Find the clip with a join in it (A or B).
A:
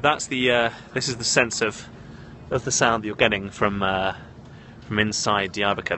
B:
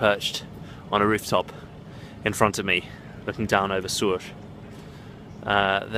B